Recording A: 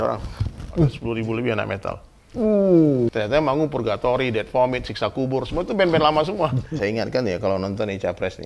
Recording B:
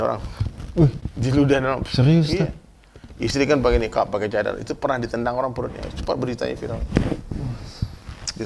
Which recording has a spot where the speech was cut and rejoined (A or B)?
A